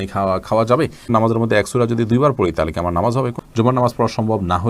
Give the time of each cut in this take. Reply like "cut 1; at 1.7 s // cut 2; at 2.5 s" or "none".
cut 1; at 1.0 s // cut 2; at 3.4 s